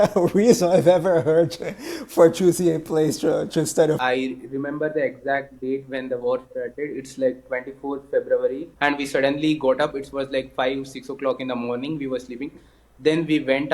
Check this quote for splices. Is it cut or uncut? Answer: cut